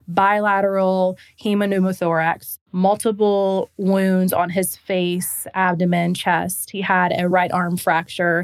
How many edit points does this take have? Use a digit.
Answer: 2